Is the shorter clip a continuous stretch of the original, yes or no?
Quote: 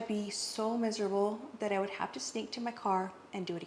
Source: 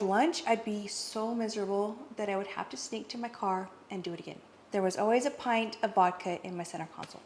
yes